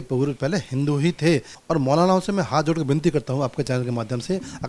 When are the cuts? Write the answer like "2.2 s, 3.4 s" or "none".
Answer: 1.5 s